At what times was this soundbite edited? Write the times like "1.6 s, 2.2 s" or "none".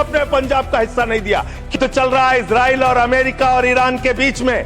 1.7 s